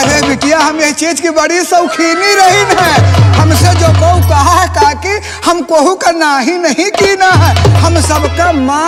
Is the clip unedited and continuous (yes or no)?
yes